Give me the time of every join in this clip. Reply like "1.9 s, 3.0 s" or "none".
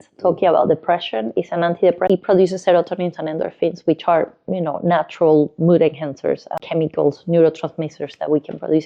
2.1 s, 6.5 s